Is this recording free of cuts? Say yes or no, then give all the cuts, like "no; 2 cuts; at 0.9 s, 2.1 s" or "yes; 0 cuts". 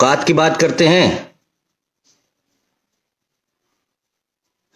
yes; 0 cuts